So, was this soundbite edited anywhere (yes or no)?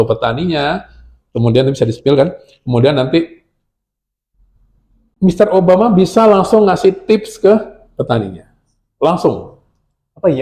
no